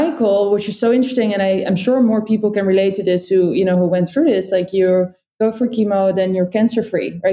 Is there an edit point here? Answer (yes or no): no